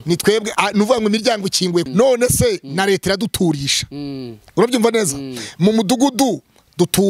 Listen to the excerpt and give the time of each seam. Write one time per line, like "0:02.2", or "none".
0:01.9